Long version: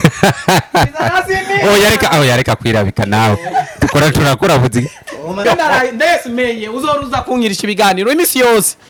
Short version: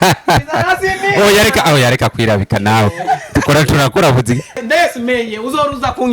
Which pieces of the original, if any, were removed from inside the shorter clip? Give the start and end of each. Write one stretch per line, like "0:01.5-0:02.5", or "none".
0:05.1-0:05.9